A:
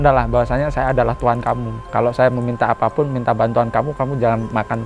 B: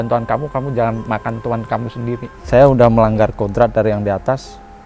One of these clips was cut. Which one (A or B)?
B